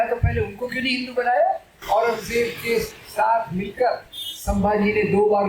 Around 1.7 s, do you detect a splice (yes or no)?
yes